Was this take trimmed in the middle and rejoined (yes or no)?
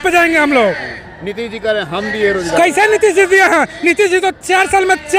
no